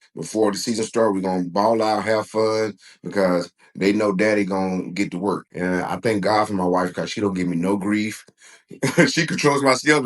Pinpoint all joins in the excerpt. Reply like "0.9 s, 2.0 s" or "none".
5.5 s